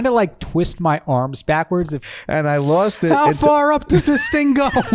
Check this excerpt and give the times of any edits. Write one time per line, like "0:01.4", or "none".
0:02.0